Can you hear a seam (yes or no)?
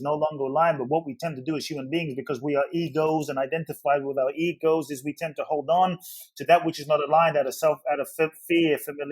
no